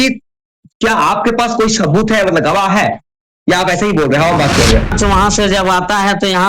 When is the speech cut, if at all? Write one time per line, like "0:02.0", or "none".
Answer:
0:04.9

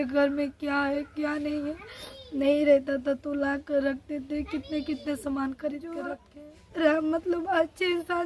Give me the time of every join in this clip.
0:06.2

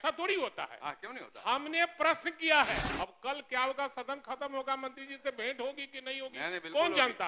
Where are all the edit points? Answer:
0:02.9

